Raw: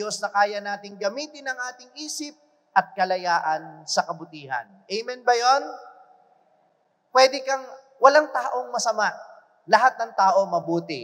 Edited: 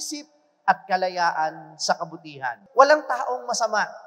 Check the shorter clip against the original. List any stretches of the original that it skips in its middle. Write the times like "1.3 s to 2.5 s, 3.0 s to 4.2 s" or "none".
4.6 s to 7.8 s